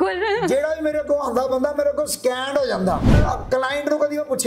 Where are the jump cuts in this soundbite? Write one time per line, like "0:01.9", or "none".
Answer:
0:03.1